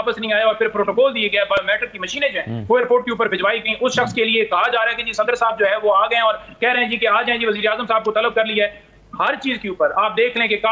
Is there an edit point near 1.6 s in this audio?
no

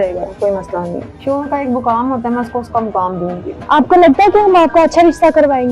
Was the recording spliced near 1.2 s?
yes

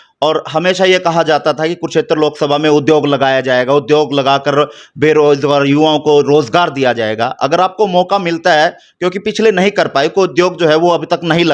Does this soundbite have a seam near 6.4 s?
no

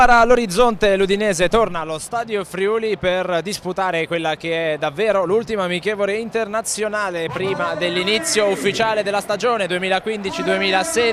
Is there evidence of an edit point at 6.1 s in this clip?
no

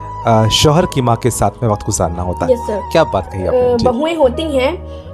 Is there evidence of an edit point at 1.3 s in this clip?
no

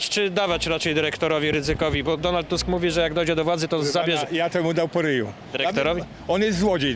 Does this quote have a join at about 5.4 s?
yes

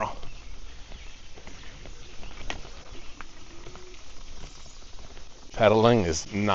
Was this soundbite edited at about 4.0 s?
no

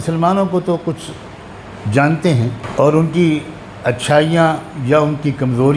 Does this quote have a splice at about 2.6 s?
yes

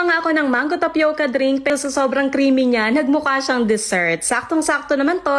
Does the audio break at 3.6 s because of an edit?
no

